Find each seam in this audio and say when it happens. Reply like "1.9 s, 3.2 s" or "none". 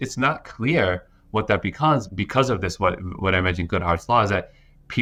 none